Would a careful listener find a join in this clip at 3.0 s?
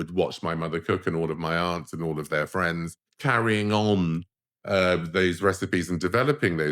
yes; 1 cut; at 3.0 s

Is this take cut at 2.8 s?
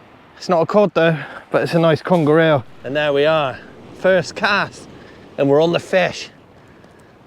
yes; 1 cut; at 2.8 s

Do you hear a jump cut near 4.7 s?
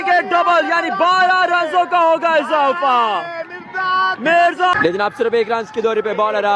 yes; 1 cut; at 4.7 s

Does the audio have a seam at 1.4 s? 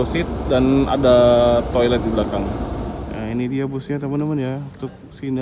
no; 1 cut; at 3.0 s

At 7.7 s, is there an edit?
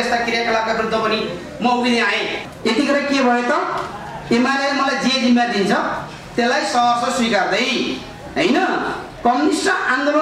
no; 1 cut; at 2.5 s

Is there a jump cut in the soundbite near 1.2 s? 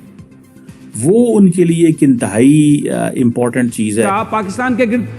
no; 1 cut; at 4.1 s

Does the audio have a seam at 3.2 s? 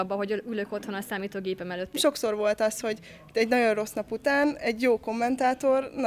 no; 1 cut; at 1.9 s

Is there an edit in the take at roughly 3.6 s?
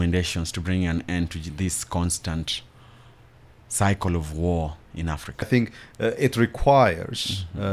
no; 1 cut; at 5.5 s

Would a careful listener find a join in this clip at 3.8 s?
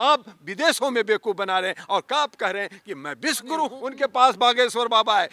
yes; 1 cut; at 3.8 s

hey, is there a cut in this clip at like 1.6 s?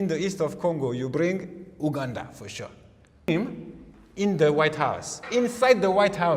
no; 1 cut; at 3.3 s

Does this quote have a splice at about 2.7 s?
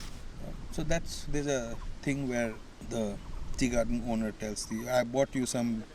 yes; 1 cut; at 2.7 s

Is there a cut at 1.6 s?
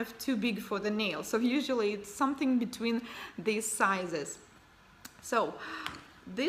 yes; 1 cut; at 1.6 s

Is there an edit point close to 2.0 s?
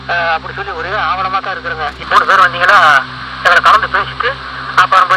yes; 1 cut; at 2.0 s

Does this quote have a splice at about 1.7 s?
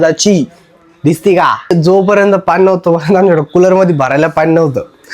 yes; 1 cut; at 1.7 s

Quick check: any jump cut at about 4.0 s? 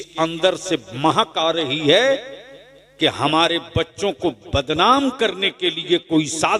no; 0 cuts

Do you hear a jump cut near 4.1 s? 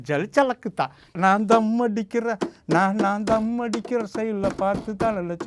no; 1 cut; at 1.0 s

